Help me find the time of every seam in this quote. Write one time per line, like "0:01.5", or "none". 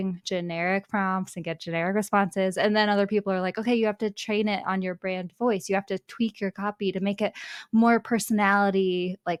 none